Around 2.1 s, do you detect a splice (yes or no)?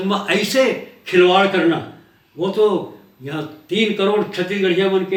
no